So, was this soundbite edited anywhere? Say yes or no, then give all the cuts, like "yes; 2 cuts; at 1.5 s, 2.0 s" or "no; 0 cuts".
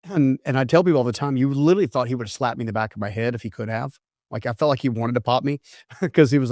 no; 0 cuts